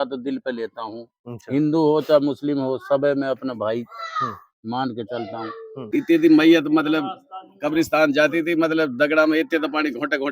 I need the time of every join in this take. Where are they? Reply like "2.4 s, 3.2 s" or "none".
5.8 s

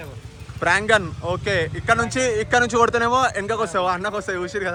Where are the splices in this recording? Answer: none

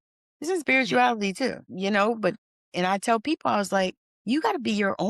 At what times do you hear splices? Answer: 1.7 s, 4.1 s

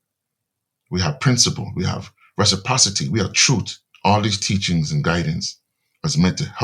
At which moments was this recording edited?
3.8 s

